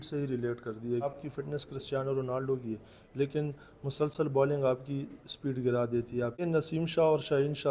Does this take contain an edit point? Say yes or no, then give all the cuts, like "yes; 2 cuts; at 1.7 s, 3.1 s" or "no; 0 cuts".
yes; 2 cuts; at 1.1 s, 6.4 s